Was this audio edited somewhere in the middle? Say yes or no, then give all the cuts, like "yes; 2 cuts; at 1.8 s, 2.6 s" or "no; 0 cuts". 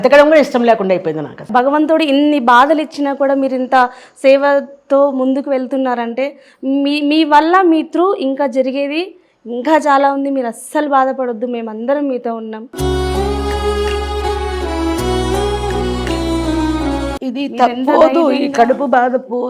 yes; 1 cut; at 1.4 s